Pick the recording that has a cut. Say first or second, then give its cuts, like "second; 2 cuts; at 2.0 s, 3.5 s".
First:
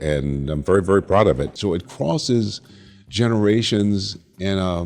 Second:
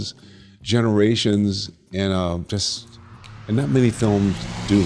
first; 1 cut; at 1.5 s